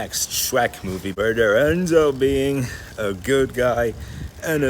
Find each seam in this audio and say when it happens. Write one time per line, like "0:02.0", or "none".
0:01.0